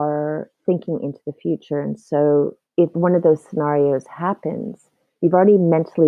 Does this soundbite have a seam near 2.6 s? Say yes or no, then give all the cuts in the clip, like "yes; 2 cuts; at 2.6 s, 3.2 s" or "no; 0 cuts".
yes; 1 cut; at 2.6 s